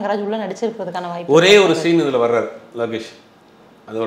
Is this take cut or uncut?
uncut